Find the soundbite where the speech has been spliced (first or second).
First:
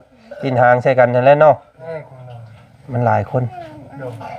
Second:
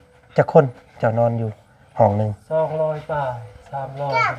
first